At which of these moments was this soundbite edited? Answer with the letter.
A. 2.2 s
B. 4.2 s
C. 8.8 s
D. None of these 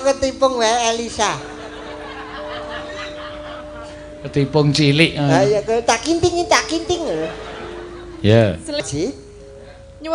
C